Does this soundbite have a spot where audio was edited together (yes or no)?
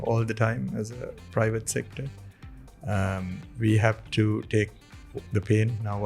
no